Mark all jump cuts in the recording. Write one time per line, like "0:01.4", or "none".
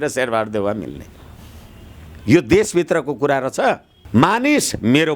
0:03.9